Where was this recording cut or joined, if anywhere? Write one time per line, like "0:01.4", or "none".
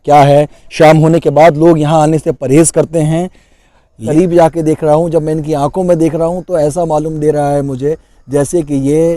0:04.0